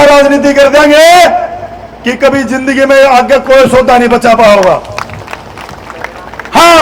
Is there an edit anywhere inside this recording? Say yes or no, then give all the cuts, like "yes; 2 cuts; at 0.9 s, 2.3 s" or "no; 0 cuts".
no; 0 cuts